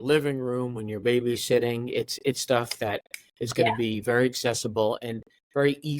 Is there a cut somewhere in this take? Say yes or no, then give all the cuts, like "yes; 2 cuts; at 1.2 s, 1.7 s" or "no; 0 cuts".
no; 0 cuts